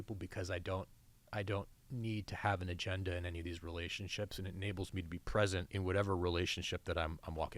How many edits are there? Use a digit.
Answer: 1